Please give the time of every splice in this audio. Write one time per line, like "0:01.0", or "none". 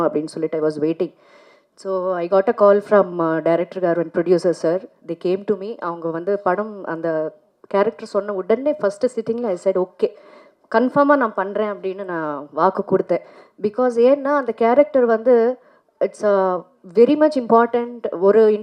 none